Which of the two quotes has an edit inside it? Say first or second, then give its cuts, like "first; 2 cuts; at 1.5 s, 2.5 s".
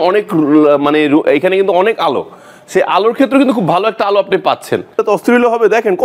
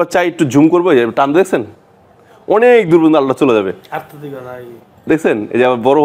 first; 1 cut; at 5.0 s